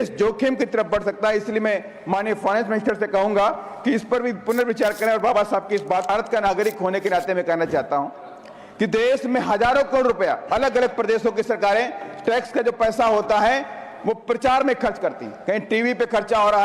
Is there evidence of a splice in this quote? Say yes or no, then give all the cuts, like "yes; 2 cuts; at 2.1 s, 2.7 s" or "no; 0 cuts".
yes; 1 cut; at 6.1 s